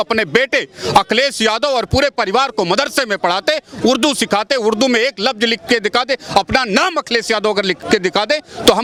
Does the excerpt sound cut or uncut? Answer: uncut